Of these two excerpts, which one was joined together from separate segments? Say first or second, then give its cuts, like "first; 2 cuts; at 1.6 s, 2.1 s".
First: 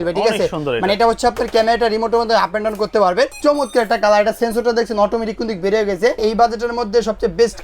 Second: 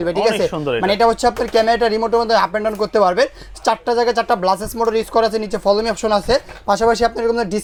first; 2 cuts; at 3.4 s, 6.2 s